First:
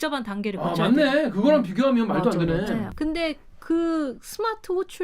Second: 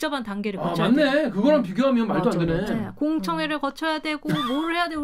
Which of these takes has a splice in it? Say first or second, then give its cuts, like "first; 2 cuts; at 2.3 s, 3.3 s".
first; 1 cut; at 2.9 s